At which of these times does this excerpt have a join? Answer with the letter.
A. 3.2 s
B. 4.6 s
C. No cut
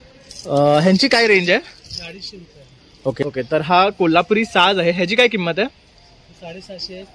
A